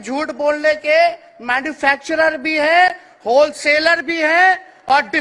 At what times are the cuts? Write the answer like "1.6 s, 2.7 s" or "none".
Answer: none